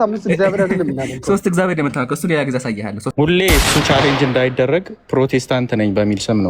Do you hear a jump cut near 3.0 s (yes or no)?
yes